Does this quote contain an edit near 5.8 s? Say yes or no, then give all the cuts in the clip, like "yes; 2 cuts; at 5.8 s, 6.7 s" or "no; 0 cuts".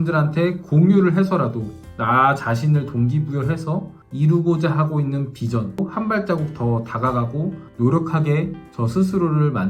yes; 2 cuts; at 4.0 s, 5.8 s